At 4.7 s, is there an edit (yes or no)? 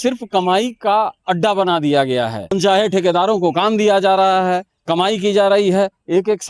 no